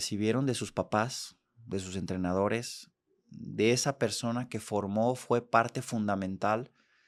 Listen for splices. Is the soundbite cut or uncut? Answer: uncut